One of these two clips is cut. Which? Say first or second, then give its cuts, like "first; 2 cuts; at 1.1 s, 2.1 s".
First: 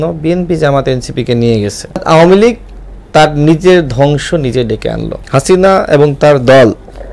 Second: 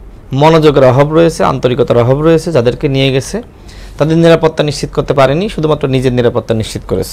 first; 2 cuts; at 2.0 s, 5.1 s